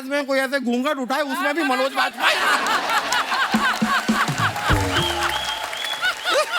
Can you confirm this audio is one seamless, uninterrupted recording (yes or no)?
yes